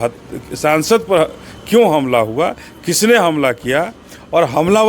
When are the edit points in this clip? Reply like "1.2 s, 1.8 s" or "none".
none

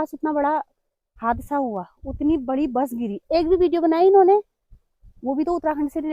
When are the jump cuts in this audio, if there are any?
none

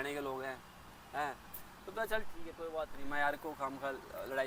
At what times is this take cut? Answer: none

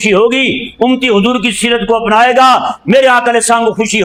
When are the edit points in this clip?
none

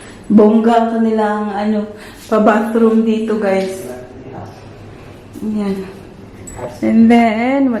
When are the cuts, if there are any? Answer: none

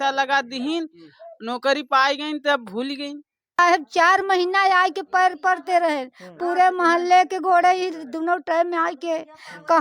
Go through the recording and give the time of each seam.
3.6 s

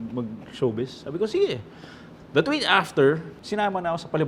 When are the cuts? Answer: 3.4 s

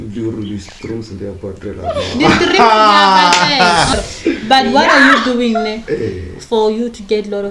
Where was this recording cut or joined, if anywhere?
3.9 s

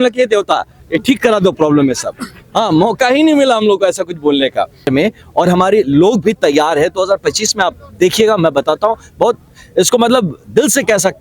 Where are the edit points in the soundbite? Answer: 4.9 s

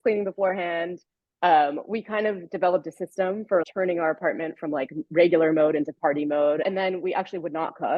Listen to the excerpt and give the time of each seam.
3.6 s, 6.6 s

